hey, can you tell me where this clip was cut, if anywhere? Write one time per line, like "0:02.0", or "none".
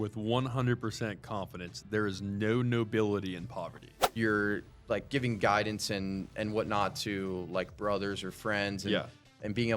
0:04.0